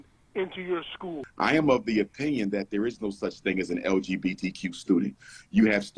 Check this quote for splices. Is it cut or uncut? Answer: cut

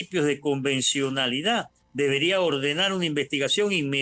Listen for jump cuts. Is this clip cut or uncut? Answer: cut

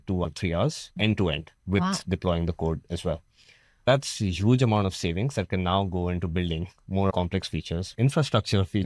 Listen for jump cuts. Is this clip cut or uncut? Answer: uncut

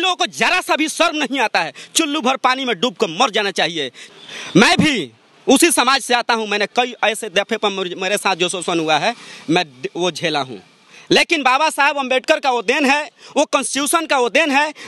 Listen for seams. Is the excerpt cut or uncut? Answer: cut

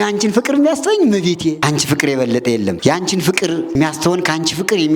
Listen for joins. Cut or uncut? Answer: cut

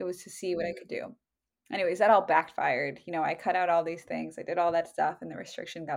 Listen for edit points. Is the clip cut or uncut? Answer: uncut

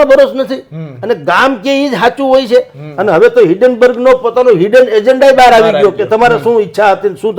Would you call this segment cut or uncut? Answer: uncut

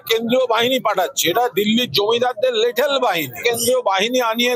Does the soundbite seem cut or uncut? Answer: cut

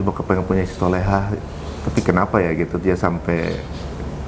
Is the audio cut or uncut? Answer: uncut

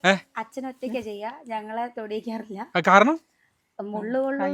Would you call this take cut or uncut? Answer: uncut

